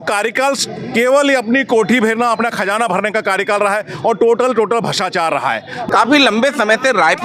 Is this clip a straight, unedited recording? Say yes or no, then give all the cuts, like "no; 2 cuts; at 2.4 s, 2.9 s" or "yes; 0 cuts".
no; 1 cut; at 5.9 s